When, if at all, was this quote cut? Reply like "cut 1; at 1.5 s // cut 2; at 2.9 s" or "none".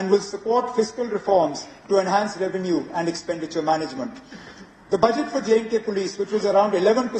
none